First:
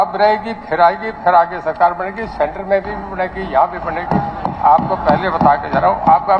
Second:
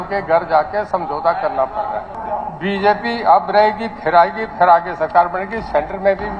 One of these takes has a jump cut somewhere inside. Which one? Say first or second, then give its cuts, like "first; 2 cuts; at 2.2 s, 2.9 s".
second; 1 cut; at 2.2 s